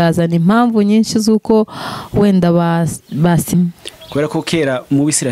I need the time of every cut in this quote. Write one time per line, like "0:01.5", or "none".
0:03.5